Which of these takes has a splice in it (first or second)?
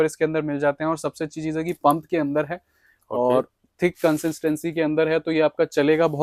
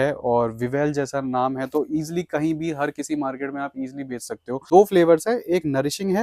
second